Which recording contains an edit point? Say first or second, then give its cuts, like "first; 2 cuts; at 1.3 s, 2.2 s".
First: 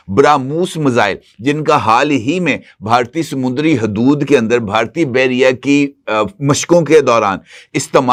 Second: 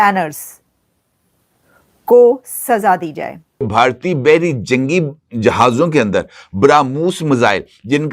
second; 1 cut; at 3.7 s